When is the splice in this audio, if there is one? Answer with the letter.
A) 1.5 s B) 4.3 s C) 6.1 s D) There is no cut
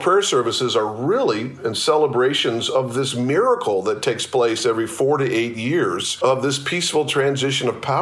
C